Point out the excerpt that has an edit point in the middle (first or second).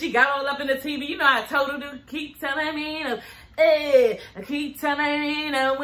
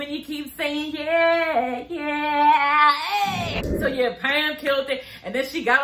second